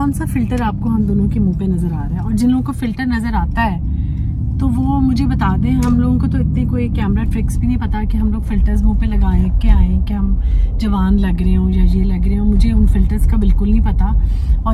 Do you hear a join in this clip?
no; 0 cuts

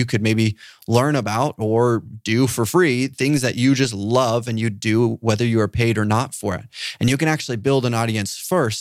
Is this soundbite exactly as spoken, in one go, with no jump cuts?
yes; 0 cuts

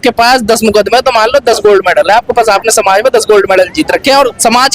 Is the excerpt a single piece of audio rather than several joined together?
yes; 0 cuts

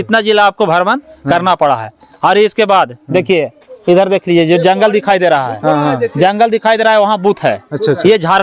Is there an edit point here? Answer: no; 0 cuts

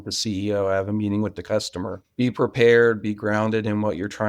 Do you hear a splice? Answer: yes; 1 cut; at 2.0 s

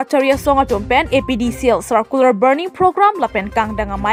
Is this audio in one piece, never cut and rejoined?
yes; 0 cuts

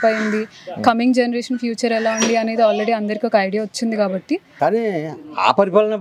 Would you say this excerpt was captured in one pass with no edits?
no; 1 cut; at 4.5 s

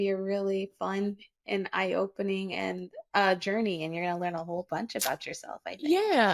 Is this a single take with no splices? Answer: yes; 0 cuts

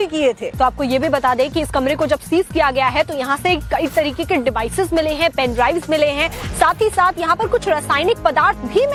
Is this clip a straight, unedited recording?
yes; 0 cuts

